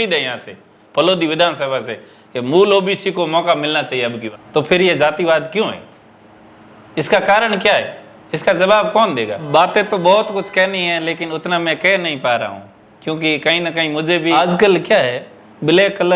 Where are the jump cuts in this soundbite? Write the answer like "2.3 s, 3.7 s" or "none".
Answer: 4.2 s, 9.5 s, 14.3 s